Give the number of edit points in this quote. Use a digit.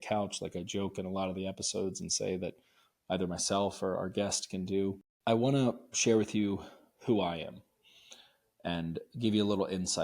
1